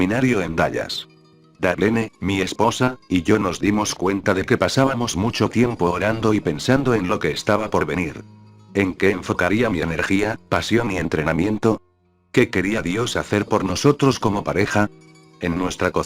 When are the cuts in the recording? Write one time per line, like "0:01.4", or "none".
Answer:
0:07.8